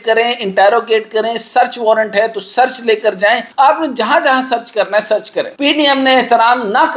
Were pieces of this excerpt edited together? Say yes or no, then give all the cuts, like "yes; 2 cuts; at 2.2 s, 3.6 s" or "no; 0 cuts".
yes; 2 cuts; at 3.5 s, 5.5 s